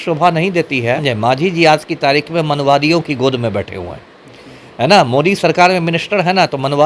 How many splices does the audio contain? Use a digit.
1